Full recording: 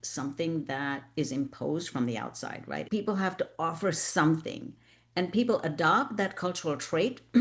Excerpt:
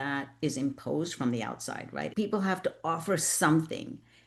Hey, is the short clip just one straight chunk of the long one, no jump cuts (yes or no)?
yes